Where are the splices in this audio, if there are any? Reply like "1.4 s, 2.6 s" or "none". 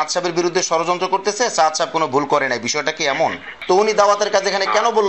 3.5 s